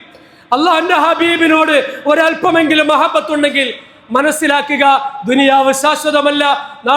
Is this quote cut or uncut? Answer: uncut